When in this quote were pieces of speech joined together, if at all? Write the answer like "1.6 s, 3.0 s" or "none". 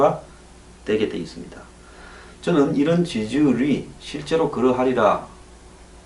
none